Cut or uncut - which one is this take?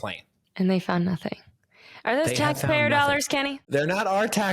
cut